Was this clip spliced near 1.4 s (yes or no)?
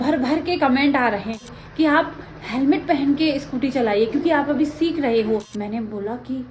yes